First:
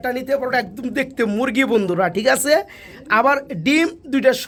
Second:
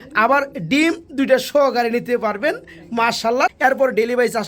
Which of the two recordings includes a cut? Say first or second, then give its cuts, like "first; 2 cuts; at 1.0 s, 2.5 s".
second; 1 cut; at 3.6 s